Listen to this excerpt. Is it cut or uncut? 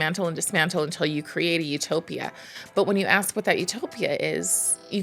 uncut